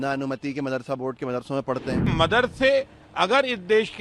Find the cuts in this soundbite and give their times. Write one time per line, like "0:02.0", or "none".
0:02.1